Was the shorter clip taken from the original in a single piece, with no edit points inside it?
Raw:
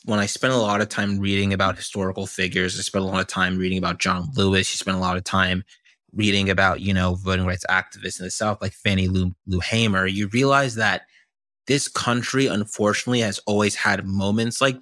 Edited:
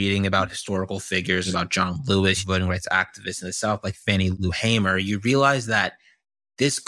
no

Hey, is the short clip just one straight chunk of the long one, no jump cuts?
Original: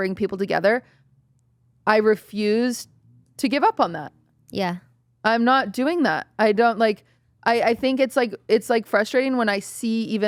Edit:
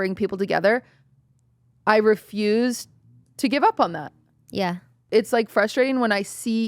no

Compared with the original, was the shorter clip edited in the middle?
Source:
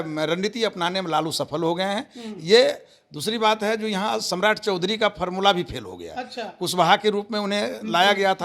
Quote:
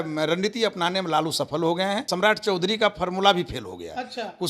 yes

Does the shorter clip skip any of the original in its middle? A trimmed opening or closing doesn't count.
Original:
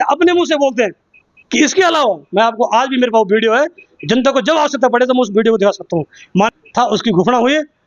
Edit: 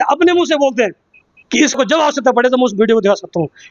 yes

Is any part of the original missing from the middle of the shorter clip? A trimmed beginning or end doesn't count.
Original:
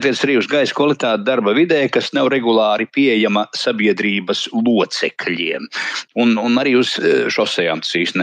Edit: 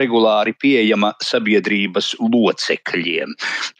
no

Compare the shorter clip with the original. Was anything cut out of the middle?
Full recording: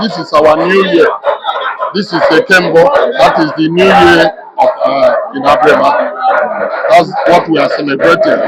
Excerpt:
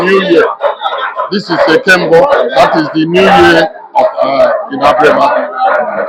no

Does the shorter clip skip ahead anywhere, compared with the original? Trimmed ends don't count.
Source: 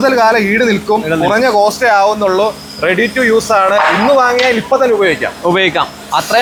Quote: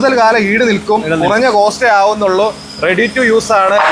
no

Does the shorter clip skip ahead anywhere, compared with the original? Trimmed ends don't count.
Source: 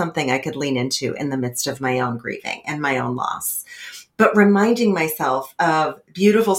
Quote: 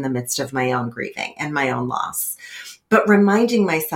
no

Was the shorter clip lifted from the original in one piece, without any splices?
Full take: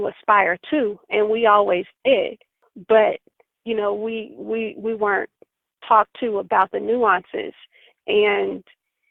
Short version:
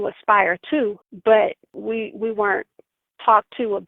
no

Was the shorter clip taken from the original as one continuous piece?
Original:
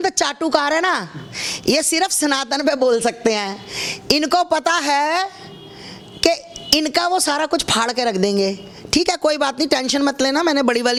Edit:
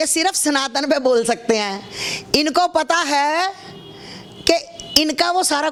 yes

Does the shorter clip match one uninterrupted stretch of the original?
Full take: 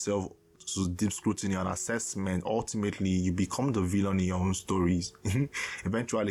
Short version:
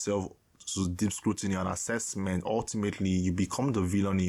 yes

